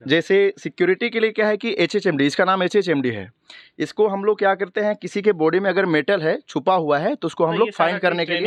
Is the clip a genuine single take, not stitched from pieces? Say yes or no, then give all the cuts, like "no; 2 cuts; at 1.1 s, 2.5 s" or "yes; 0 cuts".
yes; 0 cuts